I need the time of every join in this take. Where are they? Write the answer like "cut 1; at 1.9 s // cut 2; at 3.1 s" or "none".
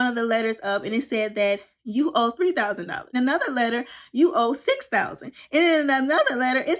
cut 1; at 3.2 s